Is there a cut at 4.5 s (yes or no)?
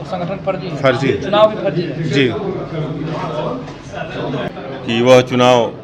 yes